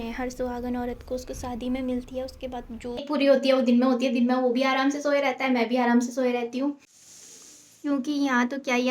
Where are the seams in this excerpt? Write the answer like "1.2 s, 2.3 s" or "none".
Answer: 3.1 s, 6.9 s

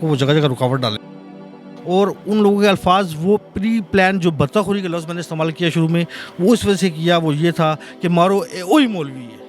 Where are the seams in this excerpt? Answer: 1.3 s

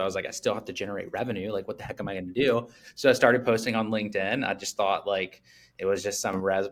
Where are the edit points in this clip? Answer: none

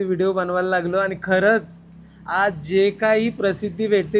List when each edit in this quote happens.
none

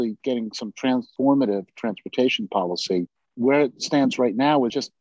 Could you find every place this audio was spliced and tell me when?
3.2 s

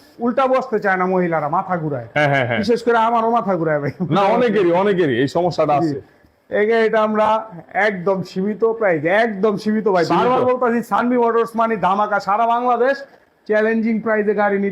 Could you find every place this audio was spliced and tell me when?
none

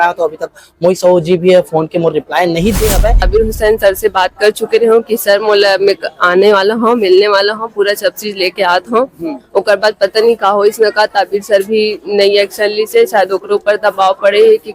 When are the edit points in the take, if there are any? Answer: 3.3 s

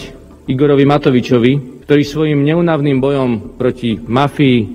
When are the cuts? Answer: 1.7 s

